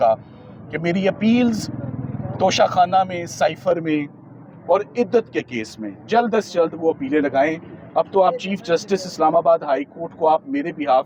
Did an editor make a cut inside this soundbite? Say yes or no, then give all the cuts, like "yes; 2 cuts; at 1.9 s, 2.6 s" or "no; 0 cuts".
no; 0 cuts